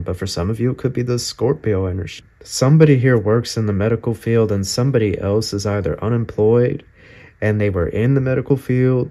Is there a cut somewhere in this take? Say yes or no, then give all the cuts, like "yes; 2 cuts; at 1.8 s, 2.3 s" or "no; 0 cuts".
yes; 1 cut; at 2.1 s